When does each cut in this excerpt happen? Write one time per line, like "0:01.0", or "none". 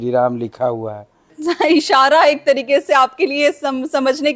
0:01.3